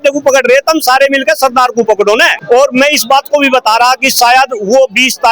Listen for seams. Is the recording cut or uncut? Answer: cut